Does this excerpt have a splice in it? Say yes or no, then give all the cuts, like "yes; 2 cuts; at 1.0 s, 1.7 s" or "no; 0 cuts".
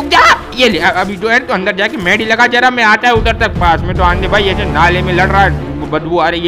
no; 0 cuts